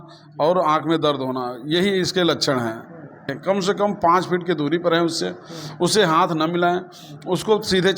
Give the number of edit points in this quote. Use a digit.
1